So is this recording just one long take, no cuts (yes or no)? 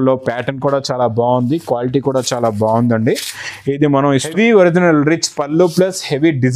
no